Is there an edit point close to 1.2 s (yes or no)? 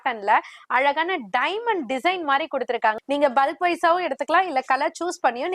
no